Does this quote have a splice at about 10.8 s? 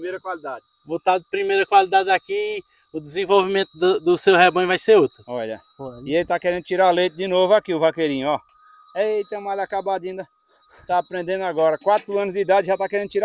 no; 1 cut; at 5.2 s

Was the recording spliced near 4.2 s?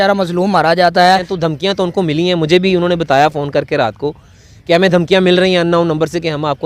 no; 1 cut; at 1.3 s

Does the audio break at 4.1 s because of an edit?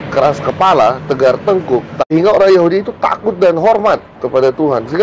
no; 1 cut; at 2.1 s

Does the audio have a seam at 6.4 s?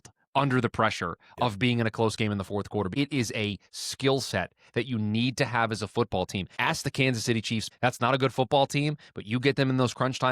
yes; 3 cuts; at 2.9 s, 6.4 s, 7.7 s

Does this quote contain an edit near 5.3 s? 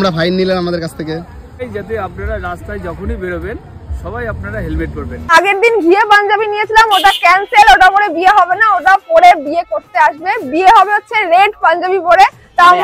yes; 2 cuts; at 1.6 s, 5.3 s

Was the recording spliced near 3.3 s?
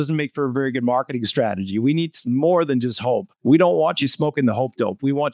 yes; 1 cut; at 3.3 s

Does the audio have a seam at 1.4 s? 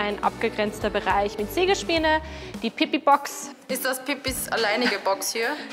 no; 1 cut; at 3.5 s

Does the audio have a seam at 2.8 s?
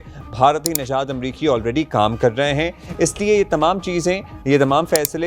yes; 1 cut; at 2.8 s

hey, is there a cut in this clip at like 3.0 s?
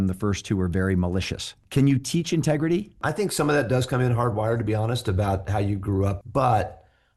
yes; 3 cuts; at 1.5 s, 3.0 s, 6.2 s

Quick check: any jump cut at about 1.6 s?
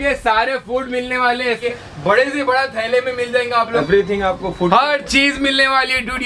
yes; 2 cuts; at 1.6 s, 3.7 s

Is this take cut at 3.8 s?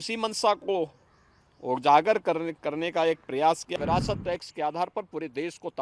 yes; 1 cut; at 3.8 s

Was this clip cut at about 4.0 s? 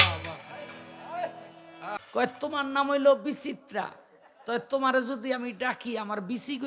no; 1 cut; at 2.0 s

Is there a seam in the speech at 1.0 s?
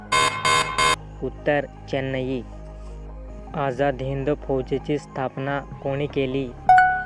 no; 0 cuts

